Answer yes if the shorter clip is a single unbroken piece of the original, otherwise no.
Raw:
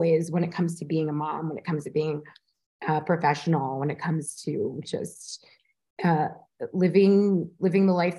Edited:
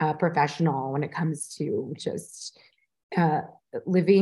yes